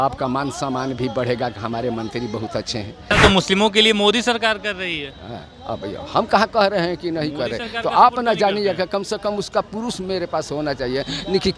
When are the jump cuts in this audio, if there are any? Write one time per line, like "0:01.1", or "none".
0:03.1